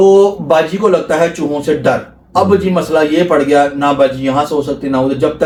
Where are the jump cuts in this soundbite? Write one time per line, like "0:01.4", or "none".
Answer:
none